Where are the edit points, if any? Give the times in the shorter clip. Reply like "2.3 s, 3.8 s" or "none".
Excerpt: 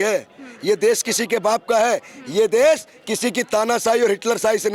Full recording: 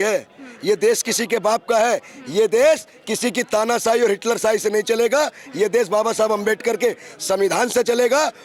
none